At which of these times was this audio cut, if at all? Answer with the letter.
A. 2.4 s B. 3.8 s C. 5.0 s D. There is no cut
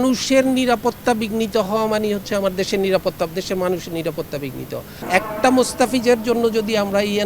C